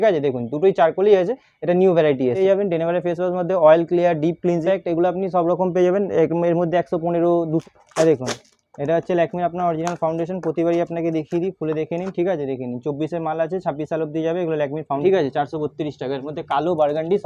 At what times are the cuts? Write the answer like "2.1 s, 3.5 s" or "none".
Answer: 2.4 s, 4.6 s, 7.6 s, 15.0 s